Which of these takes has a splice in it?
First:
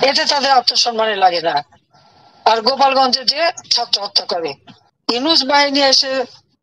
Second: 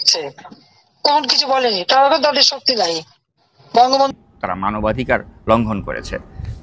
second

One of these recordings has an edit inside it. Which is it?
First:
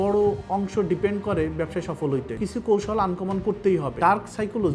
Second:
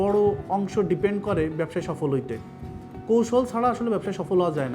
first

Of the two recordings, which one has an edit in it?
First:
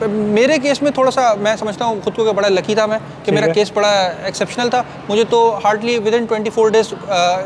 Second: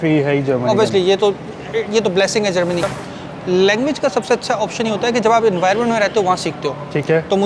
second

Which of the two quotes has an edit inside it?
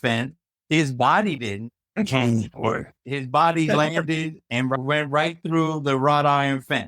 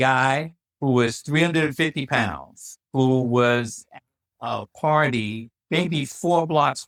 first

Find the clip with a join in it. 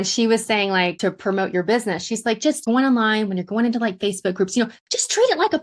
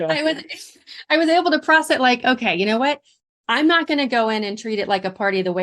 first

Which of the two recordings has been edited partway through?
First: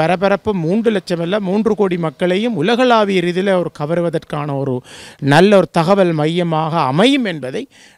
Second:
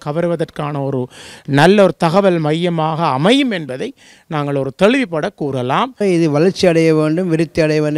second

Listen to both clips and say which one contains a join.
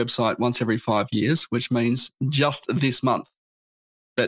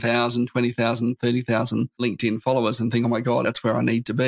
second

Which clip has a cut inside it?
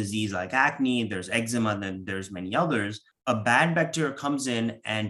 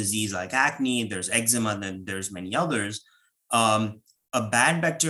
first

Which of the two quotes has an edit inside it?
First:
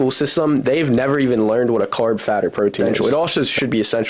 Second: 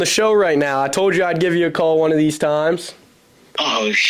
first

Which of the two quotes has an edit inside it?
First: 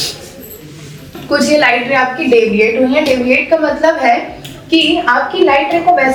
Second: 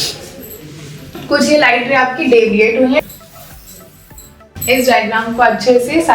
second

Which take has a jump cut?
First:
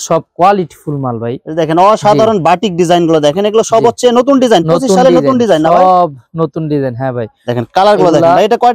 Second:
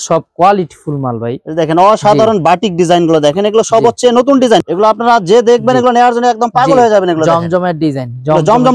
second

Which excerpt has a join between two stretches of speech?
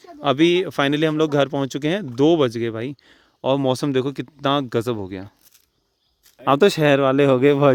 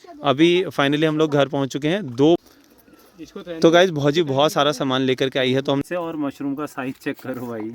second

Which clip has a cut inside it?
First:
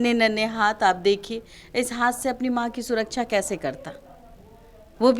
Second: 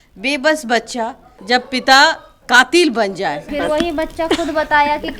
second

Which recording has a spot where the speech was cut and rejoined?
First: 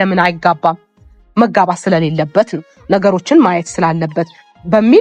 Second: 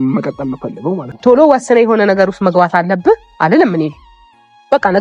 second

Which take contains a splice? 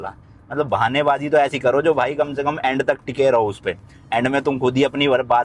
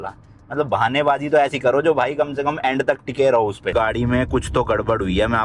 second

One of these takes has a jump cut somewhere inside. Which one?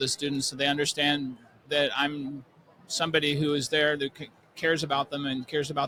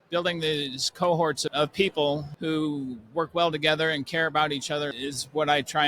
second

